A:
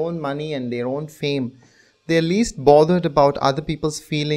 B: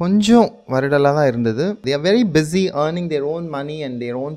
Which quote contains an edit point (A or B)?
B